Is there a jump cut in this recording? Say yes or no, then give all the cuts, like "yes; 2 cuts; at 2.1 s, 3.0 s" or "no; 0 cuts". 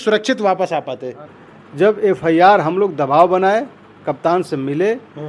yes; 1 cut; at 1.2 s